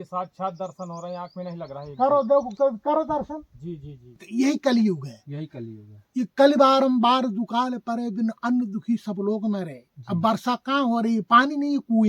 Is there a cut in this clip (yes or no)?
yes